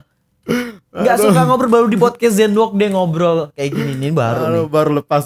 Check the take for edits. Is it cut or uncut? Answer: uncut